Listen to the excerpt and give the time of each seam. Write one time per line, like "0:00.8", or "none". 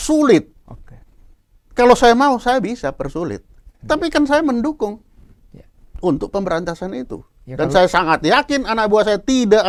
none